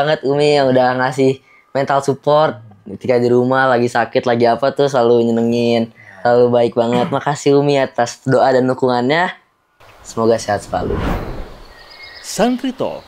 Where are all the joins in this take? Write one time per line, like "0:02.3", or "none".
0:10.9